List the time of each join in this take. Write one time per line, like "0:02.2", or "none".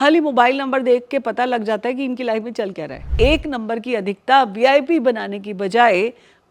0:03.1